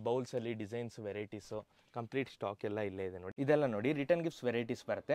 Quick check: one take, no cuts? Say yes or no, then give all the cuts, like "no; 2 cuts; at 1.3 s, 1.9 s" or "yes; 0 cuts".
no; 1 cut; at 3.3 s